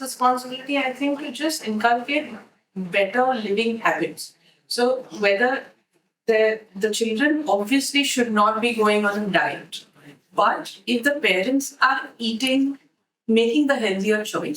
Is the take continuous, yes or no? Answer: yes